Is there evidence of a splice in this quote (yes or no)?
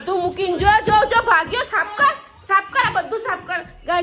no